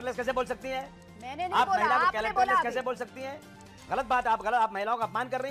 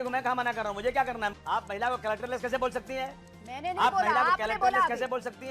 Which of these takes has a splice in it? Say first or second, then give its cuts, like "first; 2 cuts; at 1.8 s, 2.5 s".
second; 1 cut; at 1.3 s